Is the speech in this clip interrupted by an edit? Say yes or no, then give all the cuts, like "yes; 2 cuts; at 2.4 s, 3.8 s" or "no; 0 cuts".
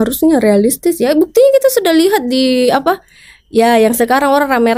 no; 0 cuts